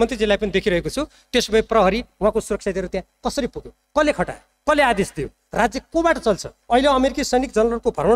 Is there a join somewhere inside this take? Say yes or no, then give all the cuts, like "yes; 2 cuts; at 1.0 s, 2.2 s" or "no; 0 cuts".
yes; 1 cut; at 6.5 s